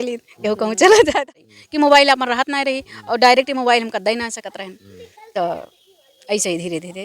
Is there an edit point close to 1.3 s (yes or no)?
yes